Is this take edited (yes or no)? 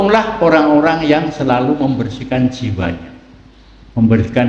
no